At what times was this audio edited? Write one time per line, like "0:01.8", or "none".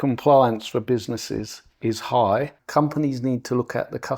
0:02.6